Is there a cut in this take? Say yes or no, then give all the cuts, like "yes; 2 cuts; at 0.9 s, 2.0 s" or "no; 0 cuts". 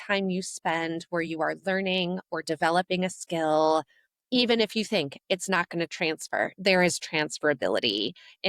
no; 0 cuts